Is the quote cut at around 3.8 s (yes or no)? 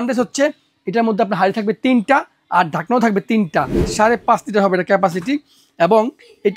yes